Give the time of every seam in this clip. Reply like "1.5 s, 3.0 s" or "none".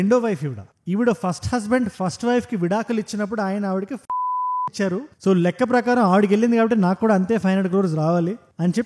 none